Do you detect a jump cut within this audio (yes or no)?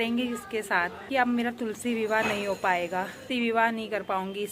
yes